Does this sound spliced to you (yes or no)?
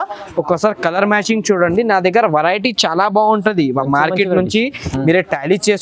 no